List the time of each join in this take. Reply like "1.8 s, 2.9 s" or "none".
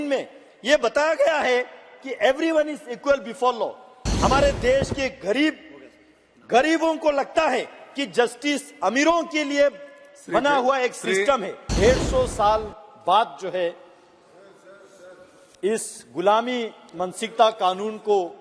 4.0 s, 11.6 s